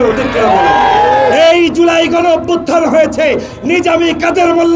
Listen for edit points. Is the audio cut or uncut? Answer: uncut